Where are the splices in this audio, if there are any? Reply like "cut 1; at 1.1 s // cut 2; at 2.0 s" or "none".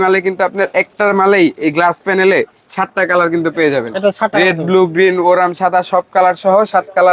none